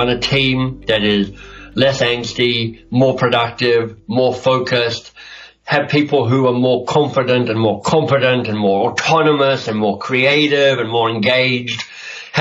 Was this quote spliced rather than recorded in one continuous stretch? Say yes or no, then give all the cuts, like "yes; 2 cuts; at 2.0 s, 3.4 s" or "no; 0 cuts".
no; 0 cuts